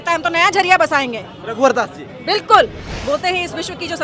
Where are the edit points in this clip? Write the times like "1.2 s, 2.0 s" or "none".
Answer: 2.9 s